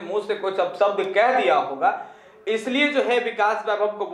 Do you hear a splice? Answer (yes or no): no